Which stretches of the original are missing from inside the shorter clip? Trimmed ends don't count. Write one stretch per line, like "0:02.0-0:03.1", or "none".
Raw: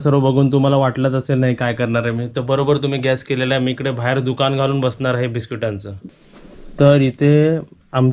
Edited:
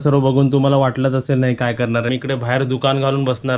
0:02.1-0:03.7

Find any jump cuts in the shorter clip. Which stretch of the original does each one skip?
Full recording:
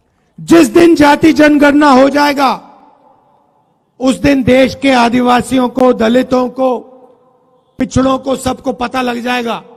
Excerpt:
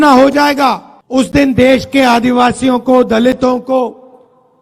0:02.7-0:03.8

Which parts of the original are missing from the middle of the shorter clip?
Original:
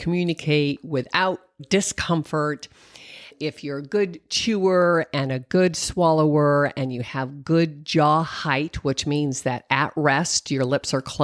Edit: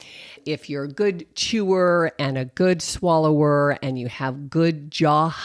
none

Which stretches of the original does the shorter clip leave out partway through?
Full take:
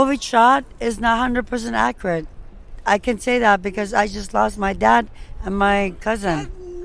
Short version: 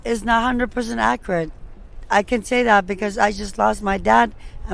none

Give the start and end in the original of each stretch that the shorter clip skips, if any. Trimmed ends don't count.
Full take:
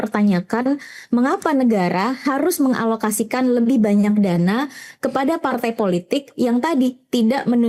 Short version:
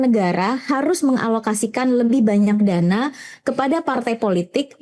none

